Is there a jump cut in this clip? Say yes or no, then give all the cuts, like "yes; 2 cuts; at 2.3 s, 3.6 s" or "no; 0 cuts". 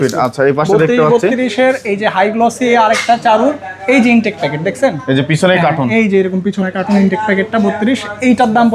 no; 0 cuts